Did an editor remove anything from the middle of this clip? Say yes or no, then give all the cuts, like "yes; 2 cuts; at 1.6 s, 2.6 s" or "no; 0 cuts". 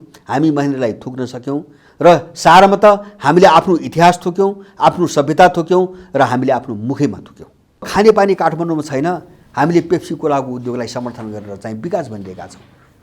yes; 1 cut; at 7.9 s